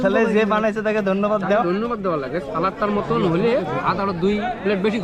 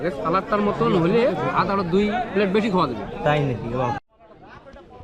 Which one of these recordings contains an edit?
second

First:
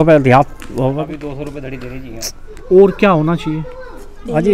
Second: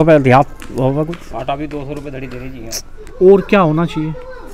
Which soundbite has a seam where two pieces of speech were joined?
first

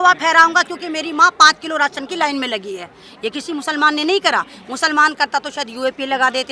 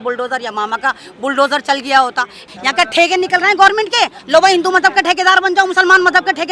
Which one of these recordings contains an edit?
second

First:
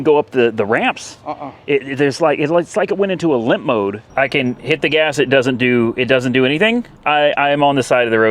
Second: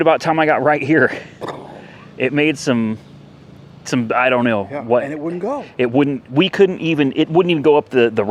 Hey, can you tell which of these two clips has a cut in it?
first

